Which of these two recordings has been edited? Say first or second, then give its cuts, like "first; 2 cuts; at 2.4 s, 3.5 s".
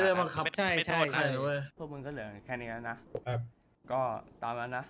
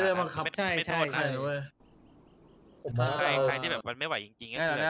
first; 2 cuts; at 1.7 s, 3.0 s